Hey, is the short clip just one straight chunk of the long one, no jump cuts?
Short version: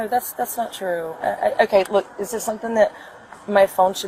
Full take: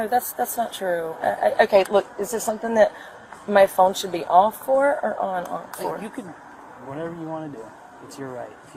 yes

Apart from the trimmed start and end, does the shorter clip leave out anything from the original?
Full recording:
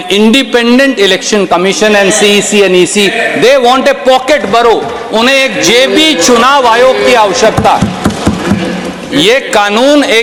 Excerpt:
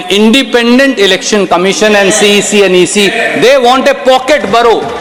no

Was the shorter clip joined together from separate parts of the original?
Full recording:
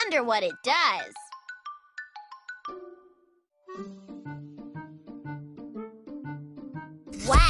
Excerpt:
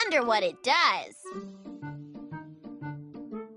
yes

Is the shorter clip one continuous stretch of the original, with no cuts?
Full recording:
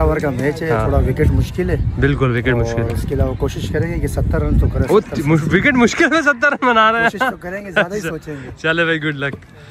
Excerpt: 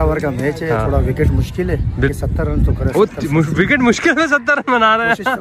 no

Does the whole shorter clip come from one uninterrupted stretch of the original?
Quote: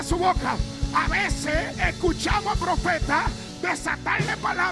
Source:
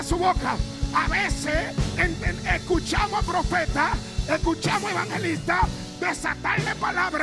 no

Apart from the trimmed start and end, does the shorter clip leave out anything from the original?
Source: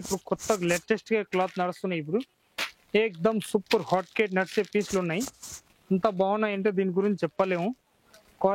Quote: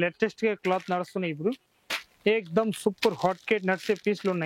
no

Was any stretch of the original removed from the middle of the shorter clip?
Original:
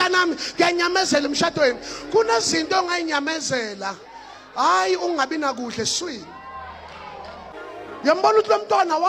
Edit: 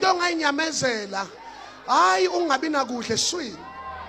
no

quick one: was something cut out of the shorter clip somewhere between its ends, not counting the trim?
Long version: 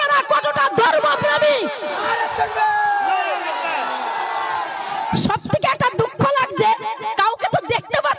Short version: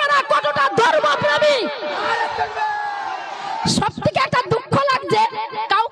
yes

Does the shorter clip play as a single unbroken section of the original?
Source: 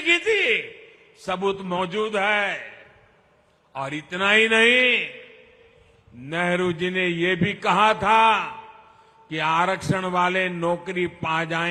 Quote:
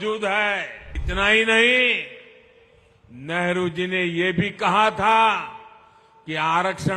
no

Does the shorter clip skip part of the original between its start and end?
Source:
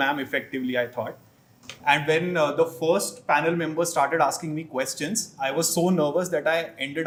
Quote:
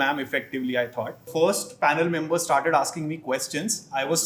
yes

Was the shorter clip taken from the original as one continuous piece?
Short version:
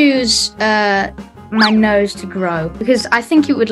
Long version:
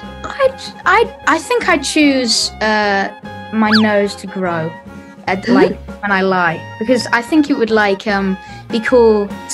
no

